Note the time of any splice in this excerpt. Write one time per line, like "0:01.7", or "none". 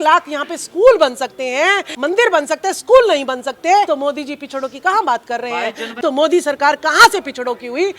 0:01.9
0:03.9
0:05.9